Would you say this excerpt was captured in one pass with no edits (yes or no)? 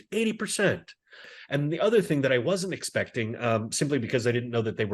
no